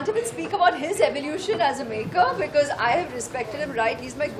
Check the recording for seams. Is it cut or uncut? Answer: uncut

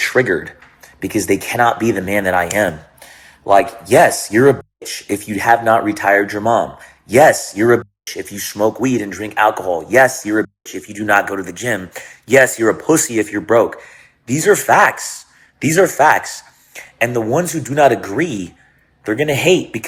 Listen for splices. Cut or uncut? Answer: uncut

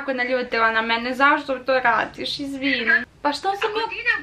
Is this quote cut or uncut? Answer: cut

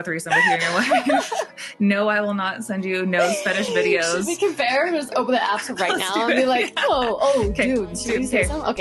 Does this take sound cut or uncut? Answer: uncut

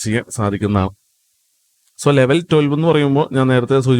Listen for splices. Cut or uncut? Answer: uncut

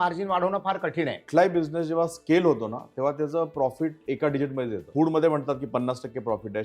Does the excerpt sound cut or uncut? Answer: cut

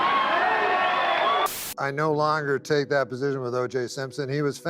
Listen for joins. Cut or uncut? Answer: cut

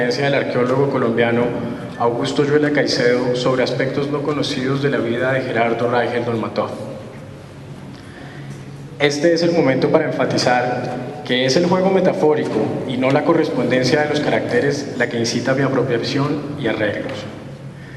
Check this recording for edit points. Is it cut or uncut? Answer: uncut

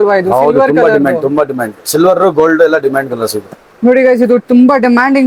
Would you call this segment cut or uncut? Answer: uncut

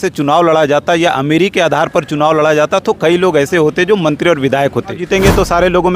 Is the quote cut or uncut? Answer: cut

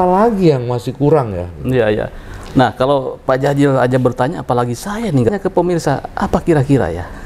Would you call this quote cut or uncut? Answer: cut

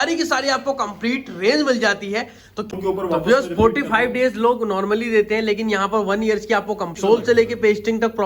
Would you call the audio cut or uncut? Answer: cut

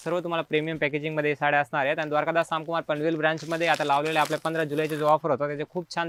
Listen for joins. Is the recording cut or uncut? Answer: uncut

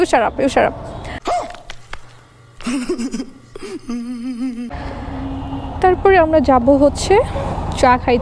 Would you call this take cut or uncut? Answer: cut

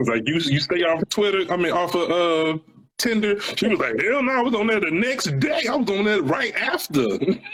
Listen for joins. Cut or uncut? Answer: uncut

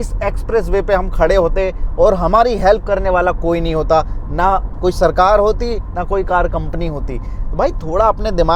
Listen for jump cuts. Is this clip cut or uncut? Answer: uncut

